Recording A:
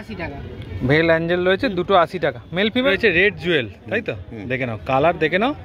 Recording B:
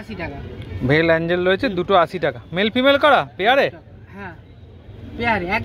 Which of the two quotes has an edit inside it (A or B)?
A